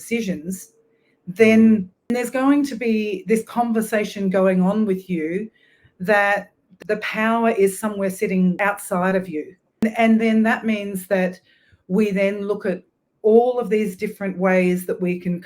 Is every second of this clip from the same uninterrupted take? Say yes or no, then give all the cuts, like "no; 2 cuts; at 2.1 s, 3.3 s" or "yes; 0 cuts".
no; 4 cuts; at 2.0 s, 6.8 s, 8.6 s, 9.8 s